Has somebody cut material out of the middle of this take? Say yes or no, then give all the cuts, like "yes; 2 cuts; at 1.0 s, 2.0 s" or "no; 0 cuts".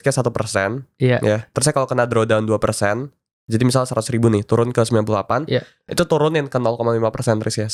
no; 0 cuts